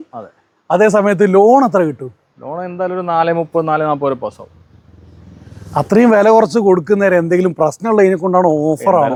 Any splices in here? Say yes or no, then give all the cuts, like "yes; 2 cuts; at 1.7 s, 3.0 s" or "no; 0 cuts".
no; 0 cuts